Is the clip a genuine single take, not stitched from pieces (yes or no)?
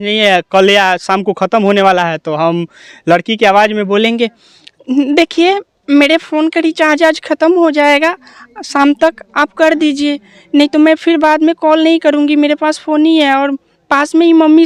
yes